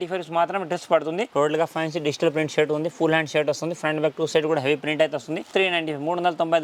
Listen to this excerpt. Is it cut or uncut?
cut